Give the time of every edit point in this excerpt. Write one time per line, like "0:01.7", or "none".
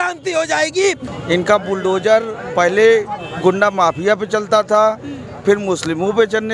0:01.0